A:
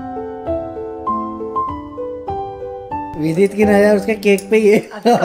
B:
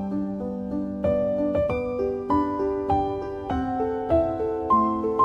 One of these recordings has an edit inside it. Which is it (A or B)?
A